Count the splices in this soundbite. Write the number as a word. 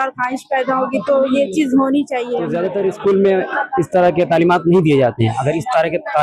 one